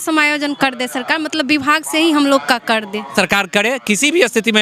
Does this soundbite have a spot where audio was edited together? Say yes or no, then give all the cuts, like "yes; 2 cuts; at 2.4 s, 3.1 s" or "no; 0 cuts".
yes; 1 cut; at 3.1 s